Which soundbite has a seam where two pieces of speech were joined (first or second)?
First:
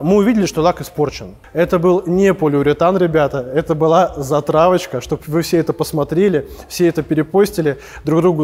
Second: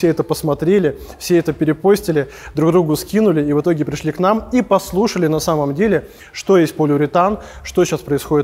first